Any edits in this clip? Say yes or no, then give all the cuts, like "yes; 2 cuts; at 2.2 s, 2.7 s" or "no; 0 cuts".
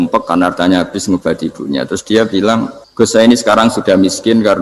yes; 1 cut; at 2.8 s